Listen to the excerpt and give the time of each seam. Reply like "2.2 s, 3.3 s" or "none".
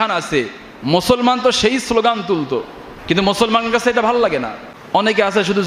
4.7 s